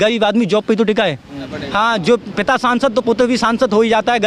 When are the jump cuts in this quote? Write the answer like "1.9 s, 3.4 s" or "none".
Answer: 1.5 s